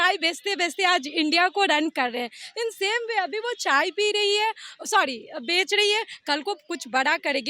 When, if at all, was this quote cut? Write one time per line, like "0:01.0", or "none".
none